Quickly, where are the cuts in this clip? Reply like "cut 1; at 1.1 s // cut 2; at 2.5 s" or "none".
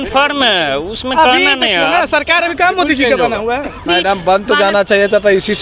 cut 1; at 3.8 s